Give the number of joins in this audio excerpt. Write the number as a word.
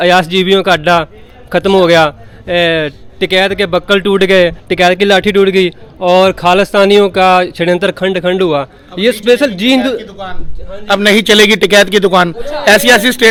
zero